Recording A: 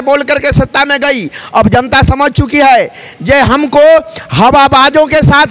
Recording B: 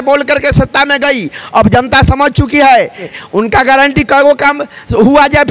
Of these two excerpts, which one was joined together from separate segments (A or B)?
B